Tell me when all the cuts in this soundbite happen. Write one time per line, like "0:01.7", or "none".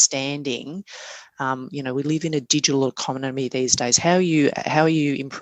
none